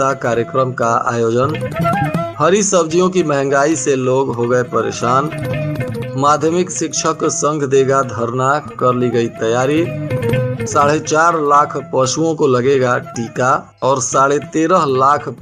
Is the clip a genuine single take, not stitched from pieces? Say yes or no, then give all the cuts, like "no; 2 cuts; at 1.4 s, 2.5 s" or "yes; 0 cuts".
yes; 0 cuts